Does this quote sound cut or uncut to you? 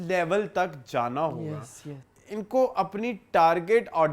cut